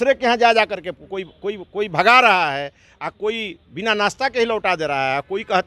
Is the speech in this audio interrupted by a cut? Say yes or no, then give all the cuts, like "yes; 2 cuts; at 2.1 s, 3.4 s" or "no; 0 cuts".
no; 0 cuts